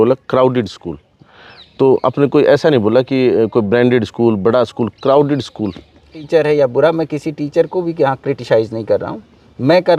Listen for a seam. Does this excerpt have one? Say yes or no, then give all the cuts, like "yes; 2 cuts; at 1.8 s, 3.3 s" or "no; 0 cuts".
yes; 1 cut; at 6.2 s